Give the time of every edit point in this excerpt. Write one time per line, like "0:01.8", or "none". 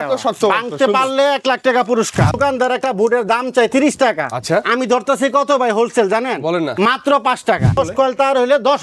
0:02.3
0:07.8